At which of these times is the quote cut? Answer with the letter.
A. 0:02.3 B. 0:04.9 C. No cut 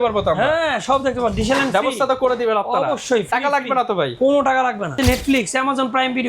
B